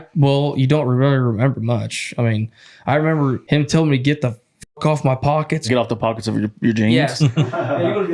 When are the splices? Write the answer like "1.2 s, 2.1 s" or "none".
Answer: 3.4 s, 5.7 s, 7.1 s